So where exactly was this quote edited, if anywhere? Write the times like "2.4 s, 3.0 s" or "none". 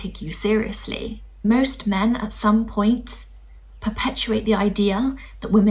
1.4 s